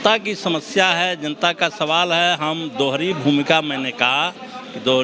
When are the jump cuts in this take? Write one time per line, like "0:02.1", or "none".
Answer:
none